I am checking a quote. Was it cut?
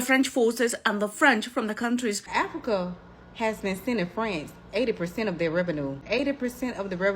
yes; 2 cuts; at 2.2 s, 6.0 s

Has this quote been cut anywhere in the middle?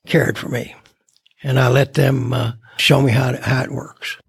yes; 1 cut; at 2.7 s

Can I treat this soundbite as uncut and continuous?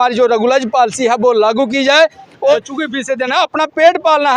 no; 1 cut; at 2.5 s

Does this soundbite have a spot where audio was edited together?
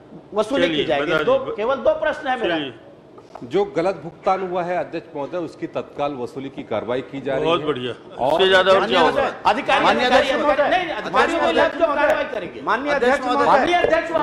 no; 0 cuts

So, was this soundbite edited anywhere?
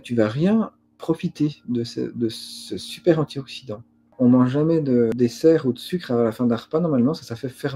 yes; 2 cuts; at 4.1 s, 5.1 s

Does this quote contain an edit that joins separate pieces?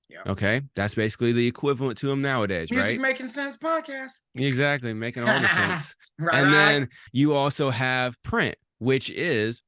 yes; 2 cuts; at 7.0 s, 8.2 s

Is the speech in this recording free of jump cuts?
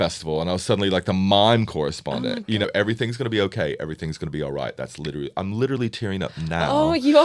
no; 1 cut; at 2.6 s

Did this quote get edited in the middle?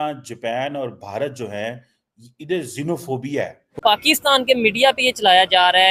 yes; 1 cut; at 3.8 s

